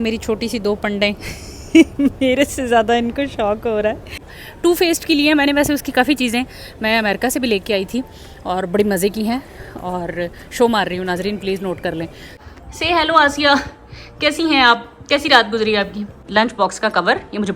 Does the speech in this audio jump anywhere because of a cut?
yes; 3 cuts; at 4.4 s, 12.4 s, 16.2 s

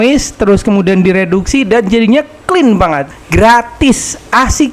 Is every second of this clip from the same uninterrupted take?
no; 1 cut; at 3.0 s

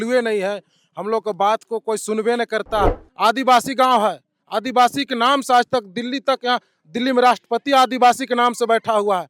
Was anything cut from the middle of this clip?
yes; 1 cut; at 3.0 s

